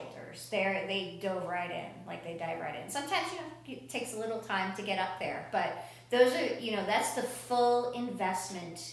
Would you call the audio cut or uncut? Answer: uncut